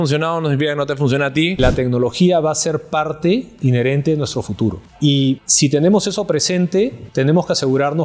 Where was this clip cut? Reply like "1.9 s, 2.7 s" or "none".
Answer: 1.6 s, 5.5 s, 7.0 s